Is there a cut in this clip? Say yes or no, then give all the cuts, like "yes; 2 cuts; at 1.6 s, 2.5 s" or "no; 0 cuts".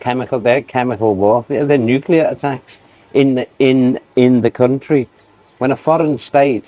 no; 0 cuts